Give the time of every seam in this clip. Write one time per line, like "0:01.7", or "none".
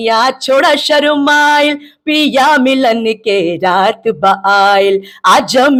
none